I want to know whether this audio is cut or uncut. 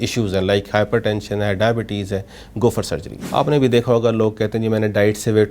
cut